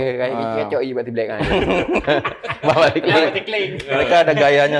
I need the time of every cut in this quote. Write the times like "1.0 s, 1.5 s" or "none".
none